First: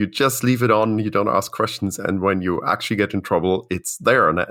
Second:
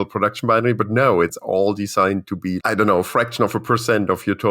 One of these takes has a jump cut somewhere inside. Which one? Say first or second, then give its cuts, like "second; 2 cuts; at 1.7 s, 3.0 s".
second; 2 cuts; at 1.3 s, 2.6 s